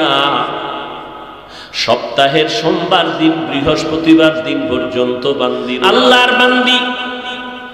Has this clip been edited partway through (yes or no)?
yes